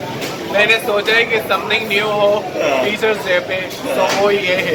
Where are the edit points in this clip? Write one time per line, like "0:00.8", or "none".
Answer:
none